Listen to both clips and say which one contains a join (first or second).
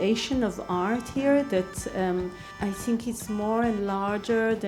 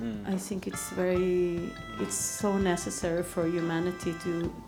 first